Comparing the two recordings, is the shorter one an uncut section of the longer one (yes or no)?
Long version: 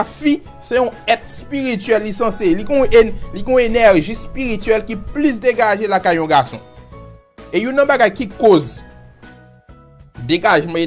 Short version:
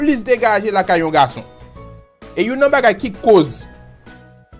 yes